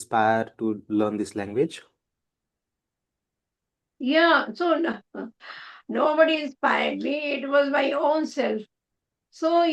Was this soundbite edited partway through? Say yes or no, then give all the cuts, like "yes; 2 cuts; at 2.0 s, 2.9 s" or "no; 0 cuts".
no; 0 cuts